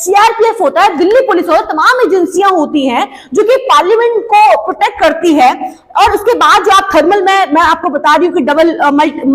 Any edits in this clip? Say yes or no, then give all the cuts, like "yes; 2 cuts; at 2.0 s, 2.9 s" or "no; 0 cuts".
no; 0 cuts